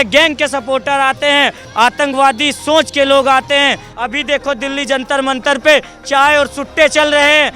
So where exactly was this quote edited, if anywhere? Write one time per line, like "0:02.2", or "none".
0:01.6
0:03.9